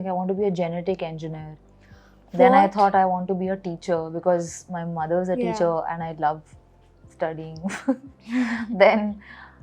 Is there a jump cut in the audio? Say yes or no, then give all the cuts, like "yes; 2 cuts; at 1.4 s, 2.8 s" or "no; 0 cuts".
no; 0 cuts